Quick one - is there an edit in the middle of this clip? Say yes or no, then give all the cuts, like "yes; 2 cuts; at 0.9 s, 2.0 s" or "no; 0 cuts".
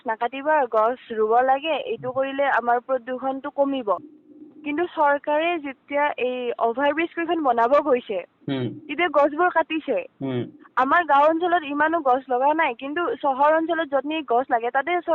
no; 0 cuts